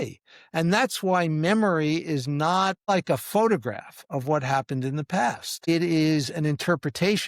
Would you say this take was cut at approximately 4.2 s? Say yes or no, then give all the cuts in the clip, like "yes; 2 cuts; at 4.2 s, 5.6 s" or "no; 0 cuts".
no; 2 cuts; at 2.9 s, 5.7 s